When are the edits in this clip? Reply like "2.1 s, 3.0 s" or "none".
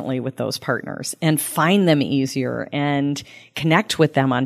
none